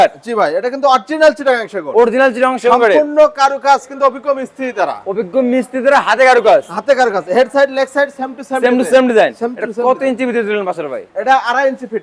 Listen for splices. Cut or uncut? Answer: uncut